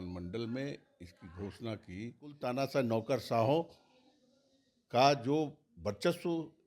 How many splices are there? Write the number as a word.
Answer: one